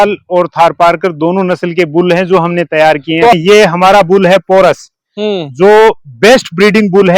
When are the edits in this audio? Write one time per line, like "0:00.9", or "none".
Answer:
0:03.3